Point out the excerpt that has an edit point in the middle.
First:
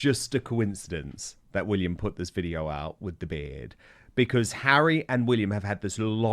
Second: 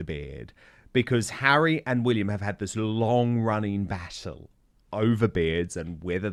first; 1 cut; at 1.4 s

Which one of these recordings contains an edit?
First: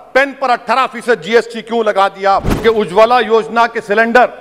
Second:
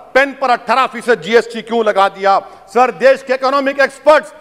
first; 1 cut; at 2.6 s

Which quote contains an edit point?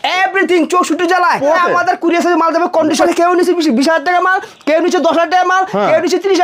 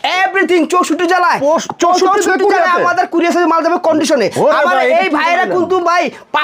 first; 2 cuts; at 1.6 s, 3.0 s

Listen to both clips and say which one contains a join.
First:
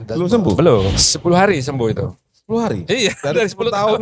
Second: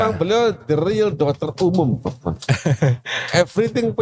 first; 1 cut; at 0.9 s

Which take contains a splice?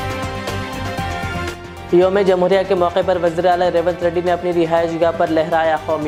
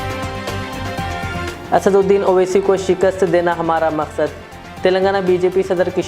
second; 1 cut; at 1.5 s

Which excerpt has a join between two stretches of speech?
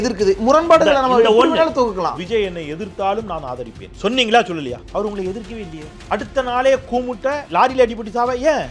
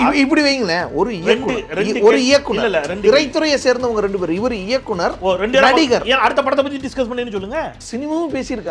first; 5 cuts; at 2.1 s, 3.8 s, 4.8 s, 5.9 s, 7.4 s

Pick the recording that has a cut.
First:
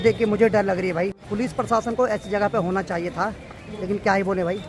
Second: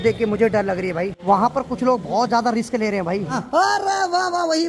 second; 2 cuts; at 1.2 s, 3.4 s

